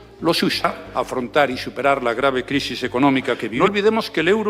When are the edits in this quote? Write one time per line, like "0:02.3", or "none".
0:00.8
0:03.5

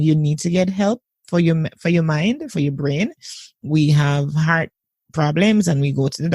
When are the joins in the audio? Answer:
0:03.6

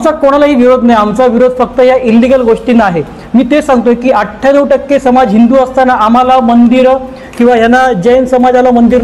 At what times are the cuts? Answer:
none

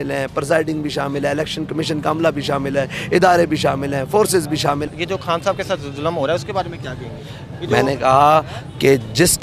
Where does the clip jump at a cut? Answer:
0:04.9

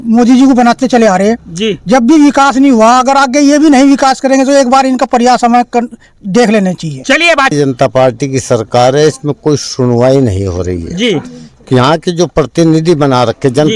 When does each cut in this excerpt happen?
0:07.5

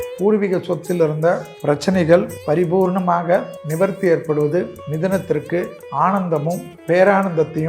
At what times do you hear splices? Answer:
0:01.5
0:02.3
0:03.6
0:04.8
0:05.8
0:06.7

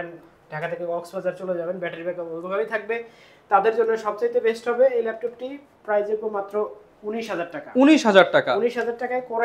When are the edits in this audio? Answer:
none

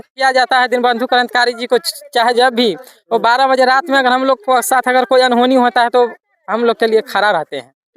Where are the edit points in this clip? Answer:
none

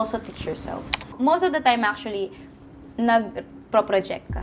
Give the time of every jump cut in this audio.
0:01.1
0:02.5

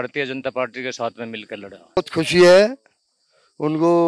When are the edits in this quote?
0:02.0

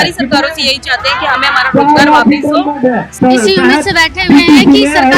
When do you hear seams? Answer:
0:03.1

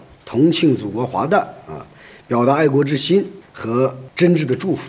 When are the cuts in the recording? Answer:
none

